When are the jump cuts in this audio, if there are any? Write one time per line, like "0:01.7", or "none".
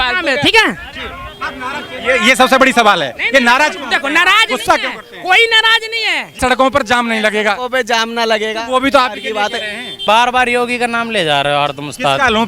0:06.4
0:10.0